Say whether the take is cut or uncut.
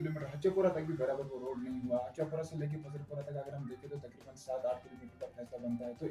uncut